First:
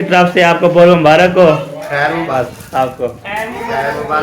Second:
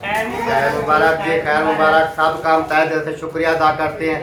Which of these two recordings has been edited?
first; 1 cut; at 2.3 s

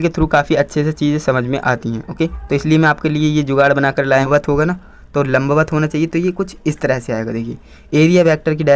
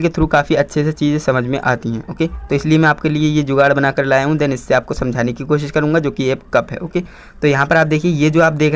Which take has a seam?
first; 1 cut; at 4.2 s

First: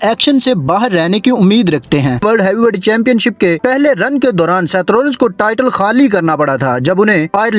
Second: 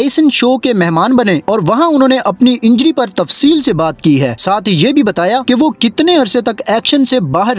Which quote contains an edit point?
first; 1 cut; at 2.2 s

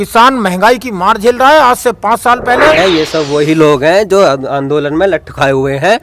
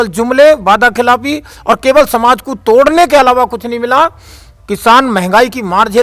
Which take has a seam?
first; 1 cut; at 2.8 s

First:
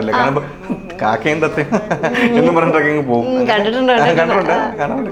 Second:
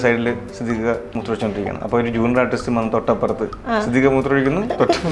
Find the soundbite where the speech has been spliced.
second; 1 cut; at 1.2 s

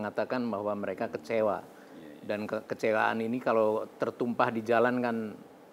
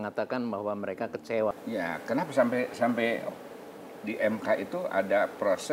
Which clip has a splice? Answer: second; 1 cut; at 1.5 s

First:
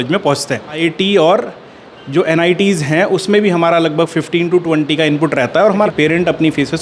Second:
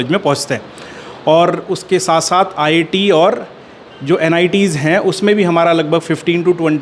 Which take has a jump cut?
first; 2 cuts; at 0.8 s, 5.9 s

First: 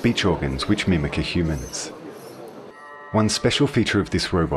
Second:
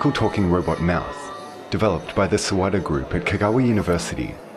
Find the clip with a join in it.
first; 1 cut; at 2.7 s

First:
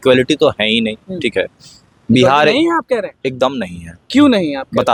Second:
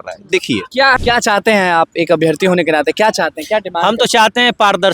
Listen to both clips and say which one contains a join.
second; 1 cut; at 1.0 s

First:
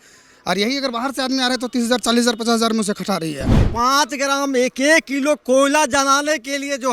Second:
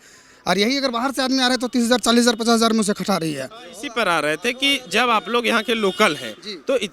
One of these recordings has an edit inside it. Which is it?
first; 1 cut; at 3.6 s

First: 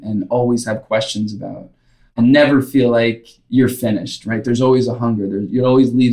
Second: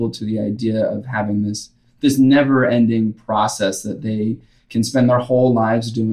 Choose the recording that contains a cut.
first; 2 cuts; at 2.1 s, 3.3 s

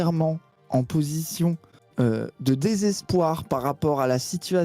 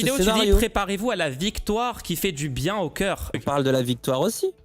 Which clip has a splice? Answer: second; 1 cut; at 3.4 s

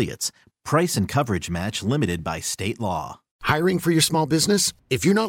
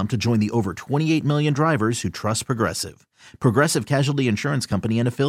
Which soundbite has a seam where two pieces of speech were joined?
first; 1 cut; at 3.3 s

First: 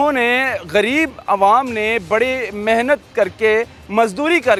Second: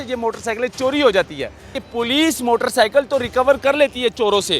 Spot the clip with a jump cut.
second; 1 cut; at 1.6 s

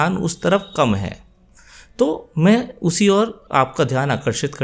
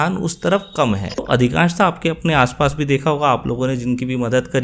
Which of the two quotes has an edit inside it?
second; 1 cut; at 1.2 s

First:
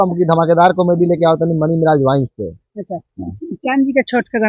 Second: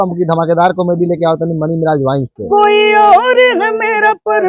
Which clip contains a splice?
second; 1 cut; at 2.4 s

